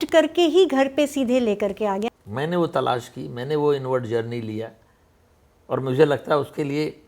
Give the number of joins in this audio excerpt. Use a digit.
1